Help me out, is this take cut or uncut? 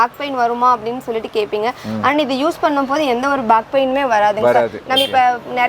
uncut